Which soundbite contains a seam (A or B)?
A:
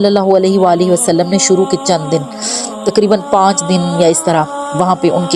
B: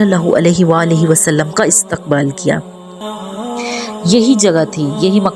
B